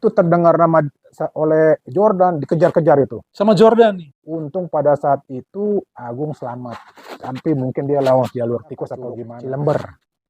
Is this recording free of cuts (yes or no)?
no